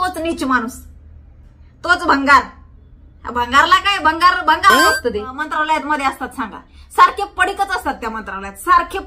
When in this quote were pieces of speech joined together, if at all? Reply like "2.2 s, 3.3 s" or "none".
5.4 s